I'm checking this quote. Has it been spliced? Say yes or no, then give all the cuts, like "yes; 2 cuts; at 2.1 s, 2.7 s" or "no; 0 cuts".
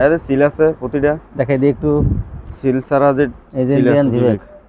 no; 0 cuts